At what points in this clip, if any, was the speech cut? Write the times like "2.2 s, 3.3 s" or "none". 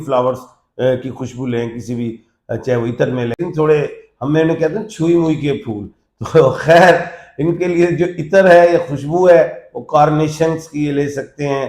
3.4 s

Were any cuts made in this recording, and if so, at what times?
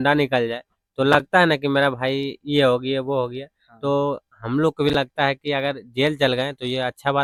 none

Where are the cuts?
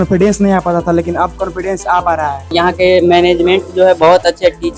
2.5 s

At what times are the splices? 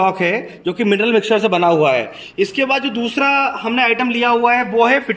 2.2 s

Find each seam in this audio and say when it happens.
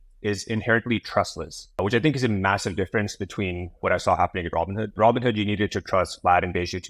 1.8 s, 3.8 s, 4.8 s

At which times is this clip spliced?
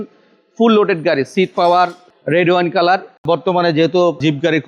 3.2 s

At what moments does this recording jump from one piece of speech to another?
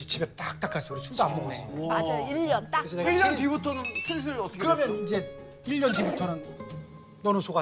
none

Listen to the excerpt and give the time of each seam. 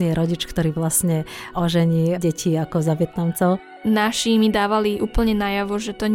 3.6 s

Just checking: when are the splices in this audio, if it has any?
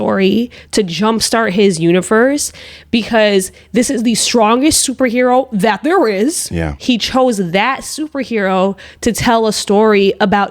6.7 s

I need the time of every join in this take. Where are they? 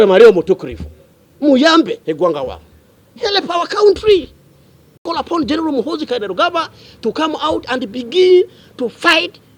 5.0 s

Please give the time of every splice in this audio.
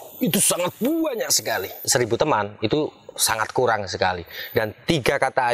1.8 s

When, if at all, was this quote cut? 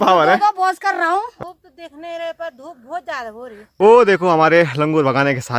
1.3 s, 3.6 s

